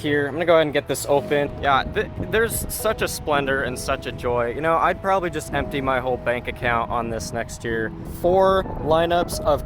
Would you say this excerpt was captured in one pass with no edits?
no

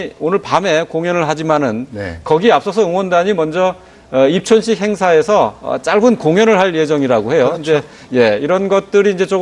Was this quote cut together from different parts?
yes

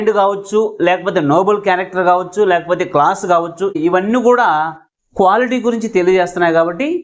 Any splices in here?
no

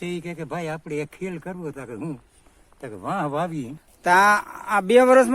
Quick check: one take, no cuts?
no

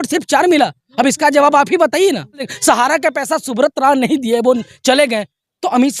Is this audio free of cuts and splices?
no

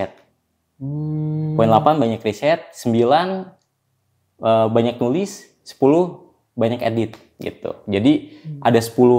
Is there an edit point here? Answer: no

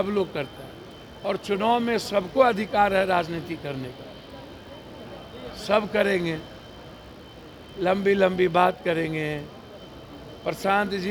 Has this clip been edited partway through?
no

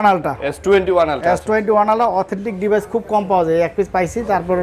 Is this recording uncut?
yes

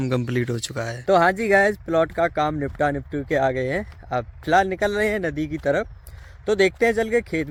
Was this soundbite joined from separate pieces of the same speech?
no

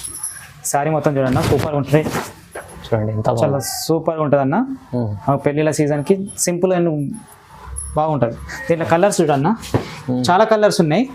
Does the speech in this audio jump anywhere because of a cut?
no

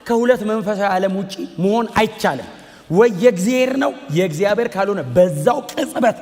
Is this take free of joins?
yes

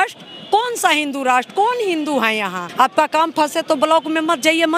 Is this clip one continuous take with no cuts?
no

